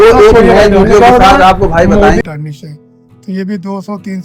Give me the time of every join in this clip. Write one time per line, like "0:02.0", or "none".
0:02.2